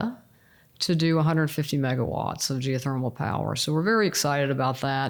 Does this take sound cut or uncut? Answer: uncut